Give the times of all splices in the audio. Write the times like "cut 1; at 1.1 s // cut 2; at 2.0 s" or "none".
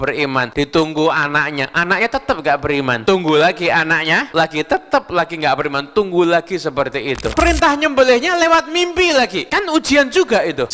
cut 1; at 7.3 s